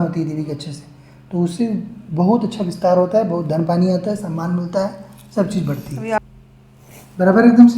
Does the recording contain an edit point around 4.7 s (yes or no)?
no